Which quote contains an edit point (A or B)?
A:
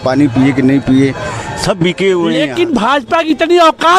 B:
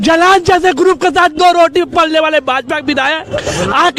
A